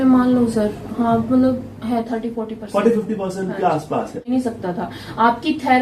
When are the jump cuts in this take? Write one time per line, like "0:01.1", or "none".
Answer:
0:04.2